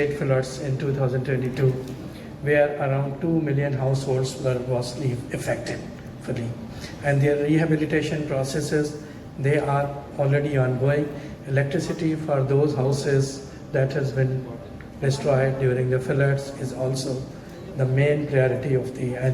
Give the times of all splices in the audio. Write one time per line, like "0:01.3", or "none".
none